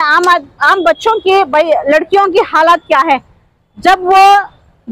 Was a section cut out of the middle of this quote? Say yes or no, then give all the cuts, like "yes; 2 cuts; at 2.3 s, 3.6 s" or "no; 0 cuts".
no; 0 cuts